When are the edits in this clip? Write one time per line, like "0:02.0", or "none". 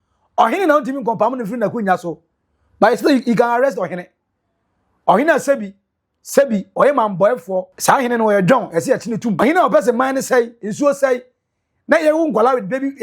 0:07.7
0:09.4